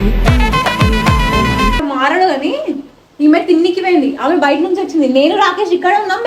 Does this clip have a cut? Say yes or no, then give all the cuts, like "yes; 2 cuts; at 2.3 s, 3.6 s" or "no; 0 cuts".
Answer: yes; 1 cut; at 1.8 s